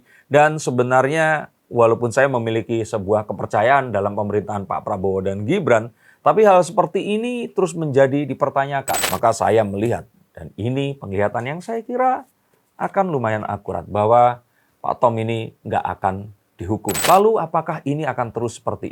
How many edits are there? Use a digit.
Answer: 2